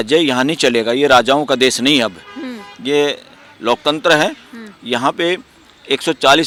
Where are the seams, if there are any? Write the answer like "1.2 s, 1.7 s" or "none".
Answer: none